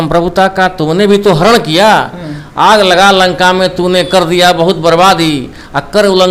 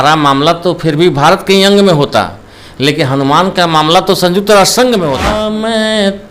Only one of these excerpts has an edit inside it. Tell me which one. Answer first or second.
second